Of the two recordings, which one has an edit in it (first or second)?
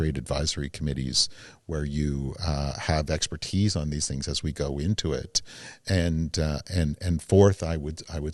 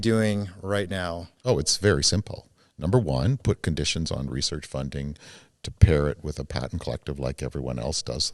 second